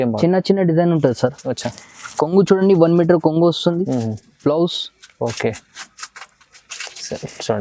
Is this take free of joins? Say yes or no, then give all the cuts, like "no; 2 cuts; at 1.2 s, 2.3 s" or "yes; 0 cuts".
yes; 0 cuts